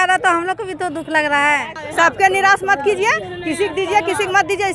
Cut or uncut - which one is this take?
cut